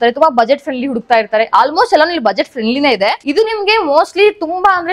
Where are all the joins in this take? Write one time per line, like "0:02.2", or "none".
0:03.2